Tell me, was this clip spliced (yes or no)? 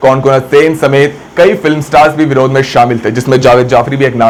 no